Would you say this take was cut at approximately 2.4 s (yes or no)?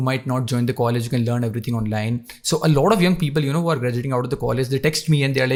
no